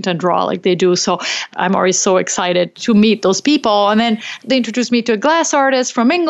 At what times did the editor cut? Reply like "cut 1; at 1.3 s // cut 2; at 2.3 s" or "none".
cut 1; at 1.5 s // cut 2; at 2.7 s // cut 3; at 4.4 s